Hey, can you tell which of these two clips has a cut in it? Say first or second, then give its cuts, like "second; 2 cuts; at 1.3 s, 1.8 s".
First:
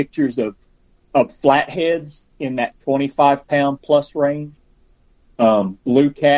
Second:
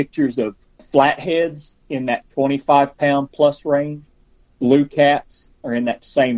second; 2 cuts; at 0.8 s, 4.5 s